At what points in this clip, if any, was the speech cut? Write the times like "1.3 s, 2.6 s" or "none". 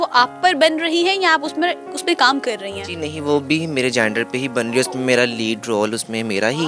none